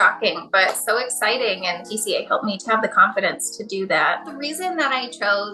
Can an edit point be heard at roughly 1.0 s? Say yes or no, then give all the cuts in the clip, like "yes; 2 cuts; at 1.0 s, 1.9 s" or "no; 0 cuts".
no; 2 cuts; at 2.4 s, 4.4 s